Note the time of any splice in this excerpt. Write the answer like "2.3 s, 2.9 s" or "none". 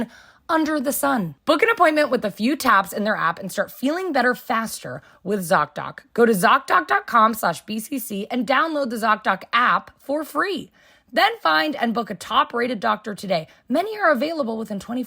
1.3 s